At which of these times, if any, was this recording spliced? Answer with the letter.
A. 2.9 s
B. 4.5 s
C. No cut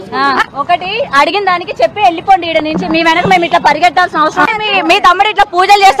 B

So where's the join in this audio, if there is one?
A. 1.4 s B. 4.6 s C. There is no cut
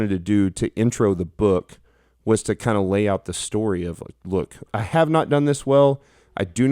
B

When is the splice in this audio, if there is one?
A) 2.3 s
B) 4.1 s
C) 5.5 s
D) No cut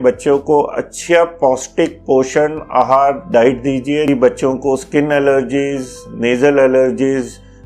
B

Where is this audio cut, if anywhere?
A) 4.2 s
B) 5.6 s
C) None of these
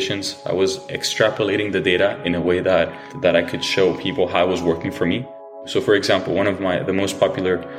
B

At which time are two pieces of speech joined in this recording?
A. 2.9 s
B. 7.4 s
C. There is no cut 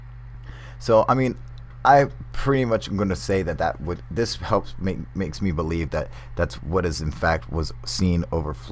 A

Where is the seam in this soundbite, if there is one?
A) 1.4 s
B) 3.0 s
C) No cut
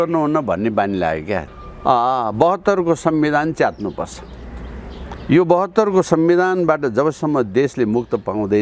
A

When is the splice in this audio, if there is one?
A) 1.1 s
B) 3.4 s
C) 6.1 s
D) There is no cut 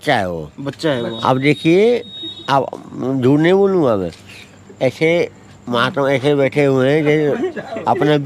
D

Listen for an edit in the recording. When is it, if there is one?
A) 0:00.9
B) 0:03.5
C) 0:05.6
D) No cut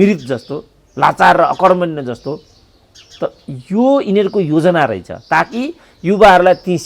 D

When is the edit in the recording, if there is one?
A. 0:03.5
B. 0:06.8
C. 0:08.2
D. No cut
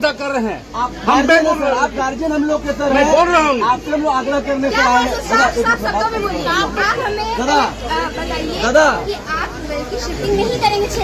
B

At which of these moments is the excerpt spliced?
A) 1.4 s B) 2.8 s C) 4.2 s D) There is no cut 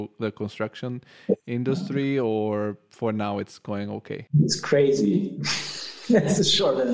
C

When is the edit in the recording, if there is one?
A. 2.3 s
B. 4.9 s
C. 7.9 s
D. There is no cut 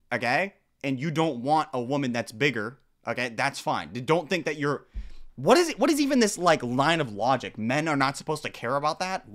D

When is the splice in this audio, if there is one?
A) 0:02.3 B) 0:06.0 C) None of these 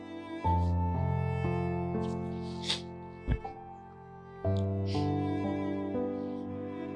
C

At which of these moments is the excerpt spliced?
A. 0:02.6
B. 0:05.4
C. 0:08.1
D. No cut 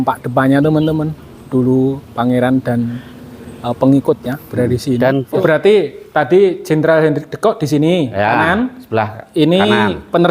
B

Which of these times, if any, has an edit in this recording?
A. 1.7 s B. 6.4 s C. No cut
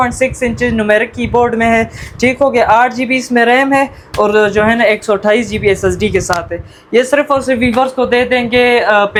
C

